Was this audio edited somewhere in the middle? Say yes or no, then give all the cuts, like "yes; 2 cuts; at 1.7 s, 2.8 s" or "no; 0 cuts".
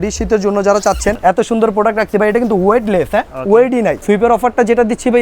yes; 2 cuts; at 1.2 s, 4.0 s